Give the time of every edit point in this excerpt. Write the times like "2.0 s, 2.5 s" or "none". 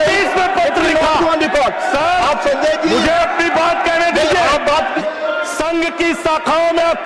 5.0 s